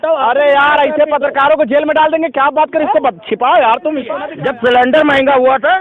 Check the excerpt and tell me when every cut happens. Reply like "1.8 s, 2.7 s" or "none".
4.2 s